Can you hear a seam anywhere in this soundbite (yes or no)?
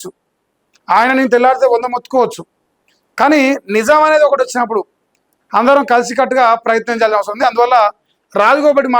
no